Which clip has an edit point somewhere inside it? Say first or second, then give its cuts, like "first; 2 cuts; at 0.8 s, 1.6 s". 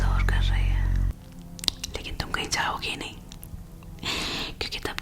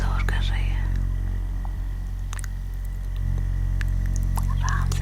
first; 1 cut; at 1.1 s